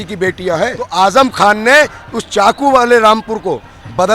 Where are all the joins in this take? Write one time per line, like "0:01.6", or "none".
0:00.9